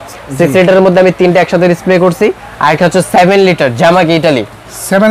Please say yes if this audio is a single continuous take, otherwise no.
yes